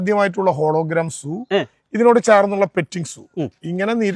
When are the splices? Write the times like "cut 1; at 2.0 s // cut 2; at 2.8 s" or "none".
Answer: none